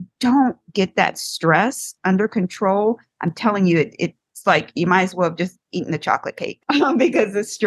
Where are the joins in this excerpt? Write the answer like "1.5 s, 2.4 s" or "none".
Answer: 4.2 s, 6.5 s